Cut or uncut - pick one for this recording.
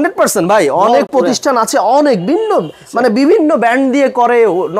uncut